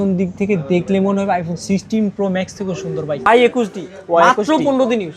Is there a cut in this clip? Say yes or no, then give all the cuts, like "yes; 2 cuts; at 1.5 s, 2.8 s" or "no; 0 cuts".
yes; 1 cut; at 3.3 s